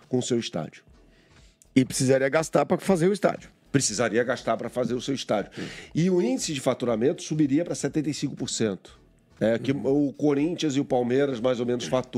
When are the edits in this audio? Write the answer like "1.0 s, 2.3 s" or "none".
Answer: none